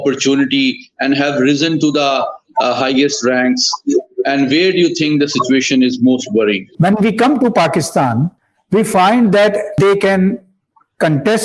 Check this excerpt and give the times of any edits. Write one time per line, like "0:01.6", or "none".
0:06.7
0:09.8